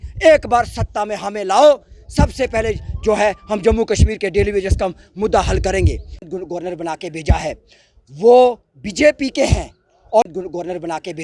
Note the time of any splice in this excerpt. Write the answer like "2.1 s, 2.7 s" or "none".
6.3 s, 10.2 s